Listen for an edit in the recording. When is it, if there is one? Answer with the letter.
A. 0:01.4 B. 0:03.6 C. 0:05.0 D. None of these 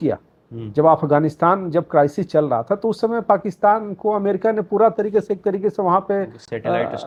D